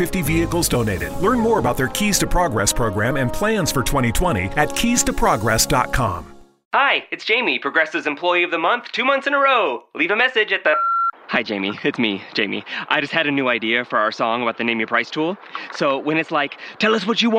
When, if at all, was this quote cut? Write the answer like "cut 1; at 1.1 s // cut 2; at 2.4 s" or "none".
cut 1; at 6.7 s